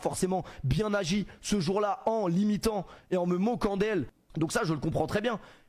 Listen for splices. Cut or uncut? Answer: cut